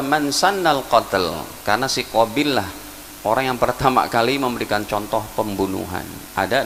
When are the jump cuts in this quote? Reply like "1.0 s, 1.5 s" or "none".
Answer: none